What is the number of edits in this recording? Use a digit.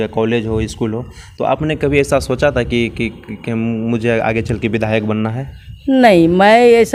0